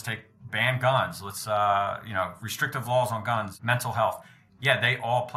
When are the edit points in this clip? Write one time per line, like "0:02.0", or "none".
0:03.5